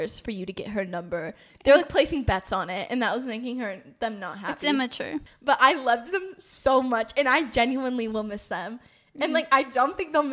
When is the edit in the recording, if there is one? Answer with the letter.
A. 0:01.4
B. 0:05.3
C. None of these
B